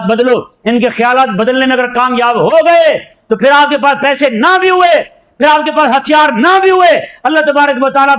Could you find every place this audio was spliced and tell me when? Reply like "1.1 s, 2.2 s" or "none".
none